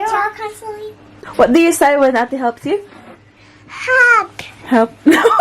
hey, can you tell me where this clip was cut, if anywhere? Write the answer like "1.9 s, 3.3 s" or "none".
1.2 s